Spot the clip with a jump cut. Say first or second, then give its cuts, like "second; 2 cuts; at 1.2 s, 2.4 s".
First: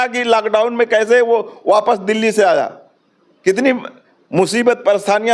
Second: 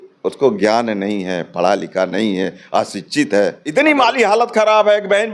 second; 1 cut; at 3.6 s